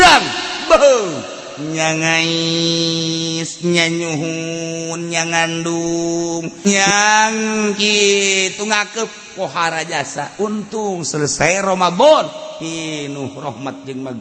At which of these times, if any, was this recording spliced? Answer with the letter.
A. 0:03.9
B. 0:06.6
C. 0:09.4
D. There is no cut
B